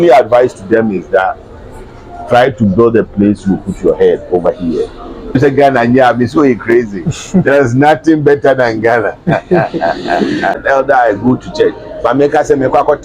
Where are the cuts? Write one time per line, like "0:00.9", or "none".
0:05.4
0:10.5

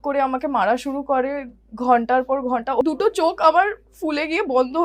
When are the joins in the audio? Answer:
0:02.8

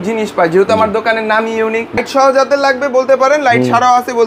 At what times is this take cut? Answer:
0:02.0

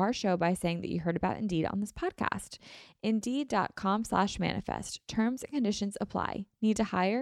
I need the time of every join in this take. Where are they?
none

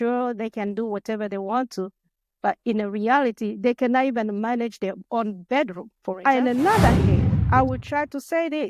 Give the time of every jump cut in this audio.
0:06.2

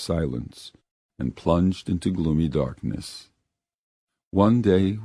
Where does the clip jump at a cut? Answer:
none

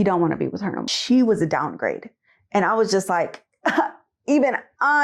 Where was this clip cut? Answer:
0:00.9

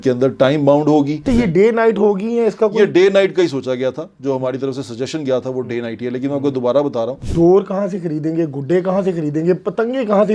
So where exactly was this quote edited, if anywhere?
0:01.2
0:07.2

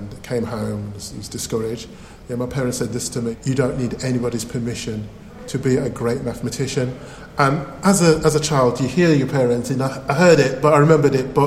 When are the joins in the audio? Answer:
0:03.3

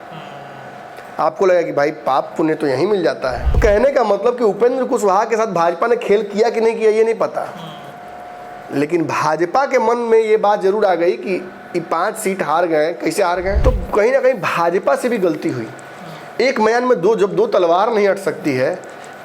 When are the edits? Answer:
0:03.6
0:13.6

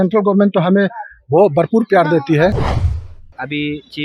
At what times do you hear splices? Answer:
0:02.8

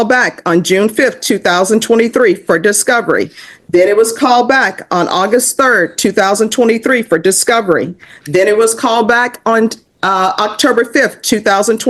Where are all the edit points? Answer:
none

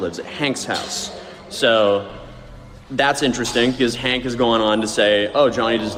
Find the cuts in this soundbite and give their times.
none

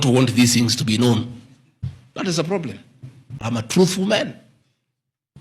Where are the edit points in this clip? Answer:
0:03.7

